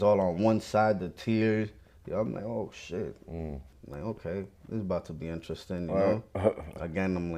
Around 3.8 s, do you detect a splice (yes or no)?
yes